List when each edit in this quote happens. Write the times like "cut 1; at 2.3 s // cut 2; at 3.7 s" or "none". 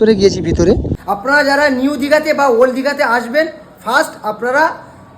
cut 1; at 0.9 s